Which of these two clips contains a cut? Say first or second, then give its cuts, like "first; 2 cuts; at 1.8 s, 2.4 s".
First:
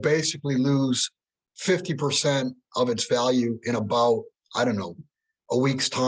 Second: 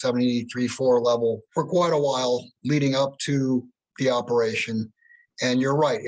second; 2 cuts; at 1.4 s, 2.5 s